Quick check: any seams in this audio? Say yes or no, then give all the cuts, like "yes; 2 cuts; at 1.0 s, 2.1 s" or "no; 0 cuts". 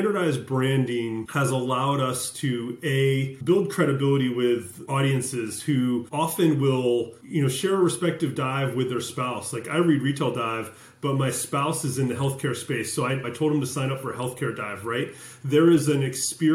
yes; 6 cuts; at 1.3 s, 3.3 s, 4.8 s, 6.1 s, 7.2 s, 13.3 s